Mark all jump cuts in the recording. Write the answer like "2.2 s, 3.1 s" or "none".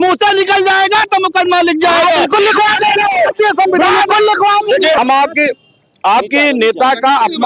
5.0 s